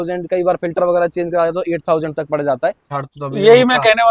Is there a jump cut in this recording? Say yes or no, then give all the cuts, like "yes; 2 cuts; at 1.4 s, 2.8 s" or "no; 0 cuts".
yes; 1 cut; at 2.8 s